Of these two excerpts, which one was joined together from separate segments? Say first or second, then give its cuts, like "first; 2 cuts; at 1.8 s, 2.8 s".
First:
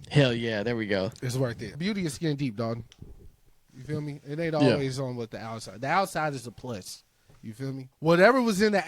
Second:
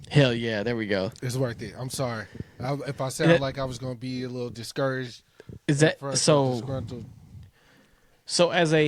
first; 2 cuts; at 1.8 s, 7.9 s